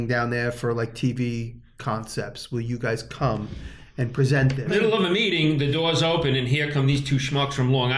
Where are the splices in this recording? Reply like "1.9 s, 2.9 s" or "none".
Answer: 4.7 s